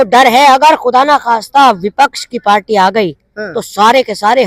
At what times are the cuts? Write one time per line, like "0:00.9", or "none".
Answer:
none